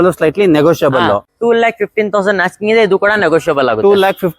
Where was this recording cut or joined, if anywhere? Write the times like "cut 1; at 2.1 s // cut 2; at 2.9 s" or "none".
cut 1; at 1.3 s